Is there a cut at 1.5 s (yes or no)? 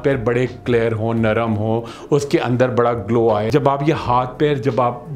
no